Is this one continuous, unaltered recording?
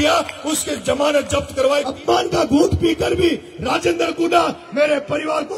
no; 1 cut; at 1.9 s

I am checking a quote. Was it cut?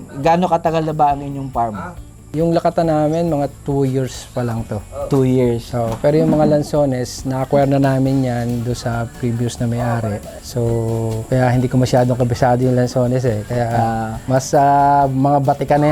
no; 0 cuts

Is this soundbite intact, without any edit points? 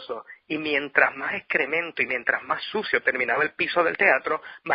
no; 1 cut; at 3.2 s

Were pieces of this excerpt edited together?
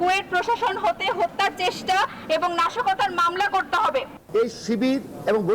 yes; 1 cut; at 4.2 s

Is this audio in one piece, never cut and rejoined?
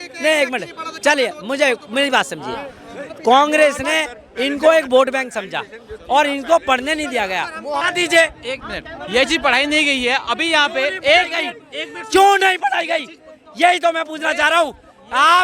no; 1 cut; at 7.8 s

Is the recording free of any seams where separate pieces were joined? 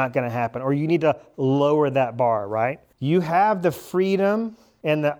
no; 1 cut; at 2.9 s

